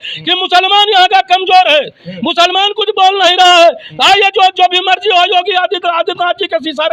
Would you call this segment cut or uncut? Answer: uncut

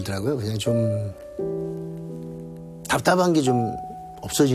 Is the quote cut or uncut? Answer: uncut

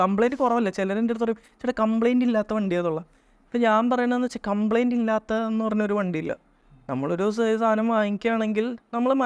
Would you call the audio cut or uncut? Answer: uncut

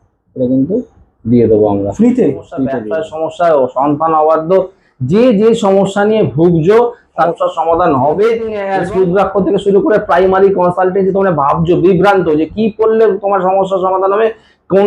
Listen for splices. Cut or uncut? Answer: cut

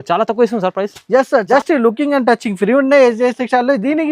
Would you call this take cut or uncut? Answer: cut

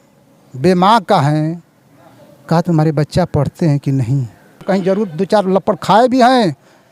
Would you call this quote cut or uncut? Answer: cut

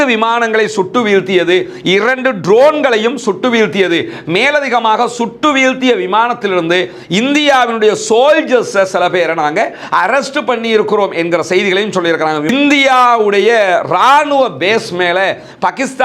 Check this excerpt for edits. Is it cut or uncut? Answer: cut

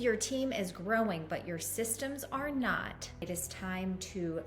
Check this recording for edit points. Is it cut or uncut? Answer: cut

